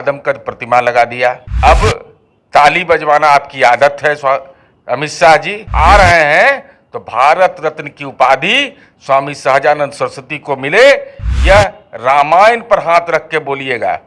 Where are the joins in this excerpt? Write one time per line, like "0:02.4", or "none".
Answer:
0:01.5
0:05.6